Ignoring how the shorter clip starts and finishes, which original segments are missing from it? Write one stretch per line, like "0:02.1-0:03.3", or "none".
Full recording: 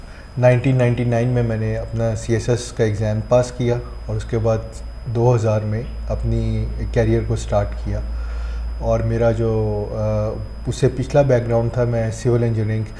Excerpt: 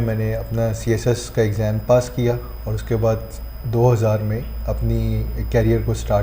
none